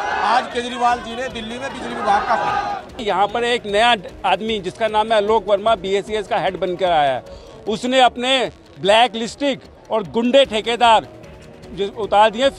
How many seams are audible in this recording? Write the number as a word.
one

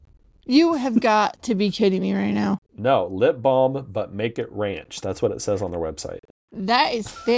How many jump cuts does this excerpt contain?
zero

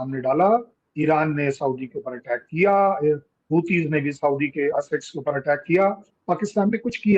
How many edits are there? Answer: zero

